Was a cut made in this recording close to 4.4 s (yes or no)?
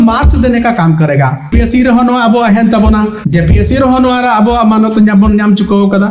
no